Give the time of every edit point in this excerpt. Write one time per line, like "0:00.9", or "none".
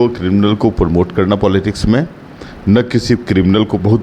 none

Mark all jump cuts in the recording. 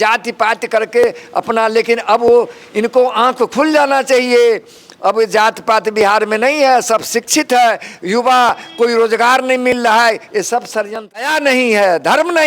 0:11.2

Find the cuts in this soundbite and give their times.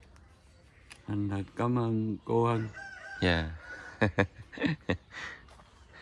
none

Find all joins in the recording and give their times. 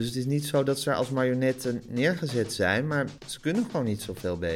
0:03.2

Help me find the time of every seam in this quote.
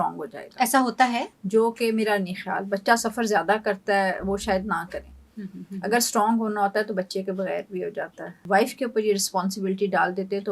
0:08.4

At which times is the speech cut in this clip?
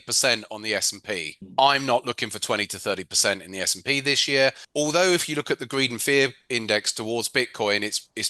0:04.6

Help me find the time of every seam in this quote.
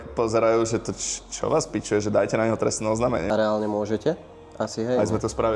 none

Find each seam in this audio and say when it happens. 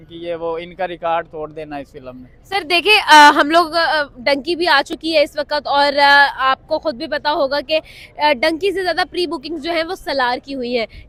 none

